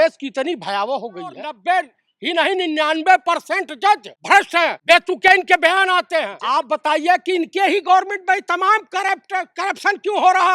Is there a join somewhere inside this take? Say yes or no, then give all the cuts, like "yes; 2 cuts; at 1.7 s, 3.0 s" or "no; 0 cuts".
yes; 3 cuts; at 1.5 s, 4.7 s, 6.4 s